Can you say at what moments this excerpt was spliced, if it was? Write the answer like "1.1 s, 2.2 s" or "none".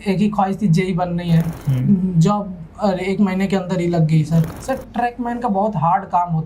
1.6 s, 4.5 s